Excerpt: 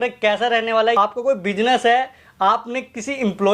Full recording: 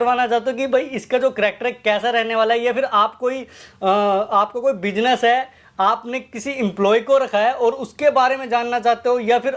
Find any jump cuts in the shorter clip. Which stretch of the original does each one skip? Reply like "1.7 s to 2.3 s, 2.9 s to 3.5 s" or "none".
2.6 s to 4.3 s

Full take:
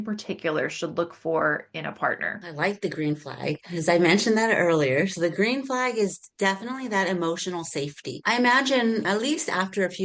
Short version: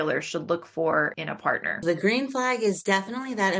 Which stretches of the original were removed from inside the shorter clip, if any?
2.3 s to 5.1 s, 6.1 s to 6.3 s

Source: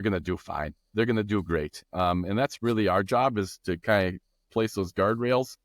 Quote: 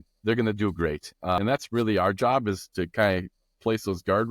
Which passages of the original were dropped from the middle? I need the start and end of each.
2.1 s to 2.3 s

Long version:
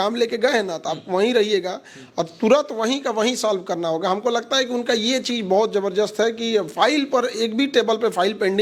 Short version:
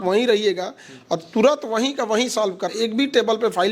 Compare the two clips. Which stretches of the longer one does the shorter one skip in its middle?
3.8 s to 7.3 s

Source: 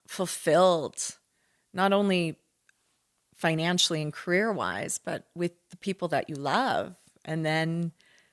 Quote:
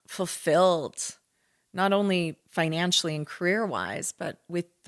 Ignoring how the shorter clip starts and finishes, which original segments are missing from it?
2.4 s to 3.3 s

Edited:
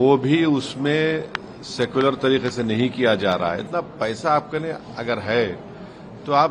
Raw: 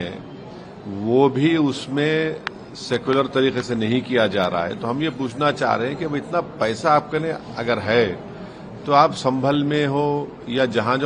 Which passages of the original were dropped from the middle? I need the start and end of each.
4.8 s to 6.3 s

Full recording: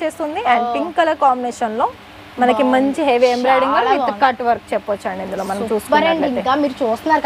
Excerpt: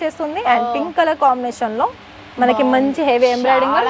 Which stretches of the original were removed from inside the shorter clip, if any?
none

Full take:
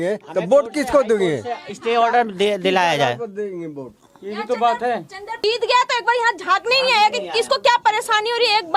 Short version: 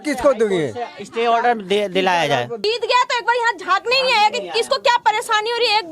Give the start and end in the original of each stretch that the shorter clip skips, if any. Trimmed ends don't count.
3.2 s to 5.3 s

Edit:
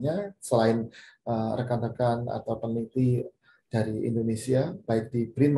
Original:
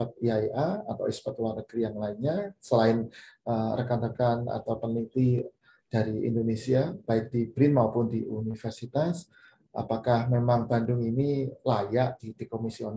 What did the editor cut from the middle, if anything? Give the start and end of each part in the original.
none

